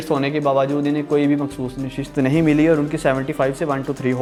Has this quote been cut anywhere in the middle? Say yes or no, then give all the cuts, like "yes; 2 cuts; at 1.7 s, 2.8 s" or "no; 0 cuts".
no; 0 cuts